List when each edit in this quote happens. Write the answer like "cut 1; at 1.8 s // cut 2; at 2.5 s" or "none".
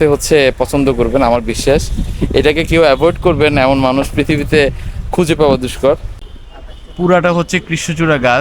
cut 1; at 6.1 s